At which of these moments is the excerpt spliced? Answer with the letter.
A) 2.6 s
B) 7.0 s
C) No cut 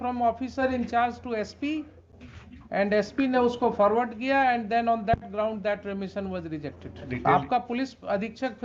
B